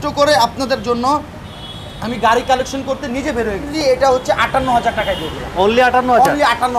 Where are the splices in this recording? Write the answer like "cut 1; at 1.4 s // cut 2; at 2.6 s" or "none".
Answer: cut 1; at 4.0 s

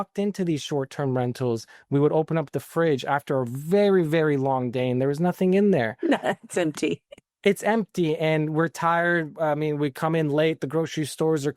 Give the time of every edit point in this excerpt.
none

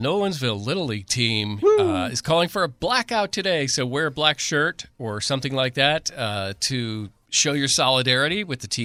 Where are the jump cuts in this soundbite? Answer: none

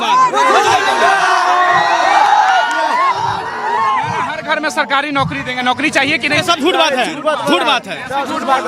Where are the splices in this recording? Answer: none

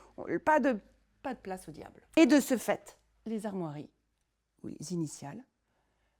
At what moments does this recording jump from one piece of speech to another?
cut 1; at 2.2 s

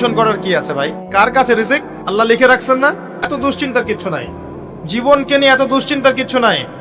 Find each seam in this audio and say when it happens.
cut 1; at 1.0 s // cut 2; at 2.0 s // cut 3; at 3.4 s

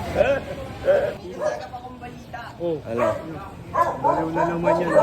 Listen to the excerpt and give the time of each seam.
cut 1; at 1.1 s

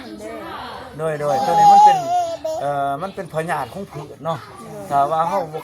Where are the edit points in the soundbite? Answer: none

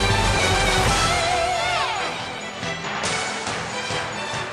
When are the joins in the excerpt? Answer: cut 1; at 1.5 s

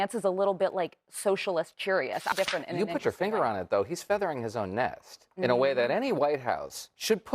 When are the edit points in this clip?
cut 1; at 2.3 s

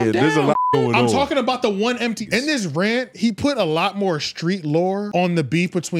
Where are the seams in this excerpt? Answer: cut 1; at 2.2 s // cut 2; at 5.1 s

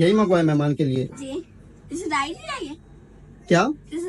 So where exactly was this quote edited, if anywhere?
none

